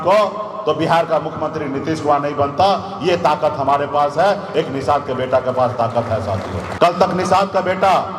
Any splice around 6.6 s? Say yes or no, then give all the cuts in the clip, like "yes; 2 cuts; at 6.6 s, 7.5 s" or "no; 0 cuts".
yes; 1 cut; at 6.6 s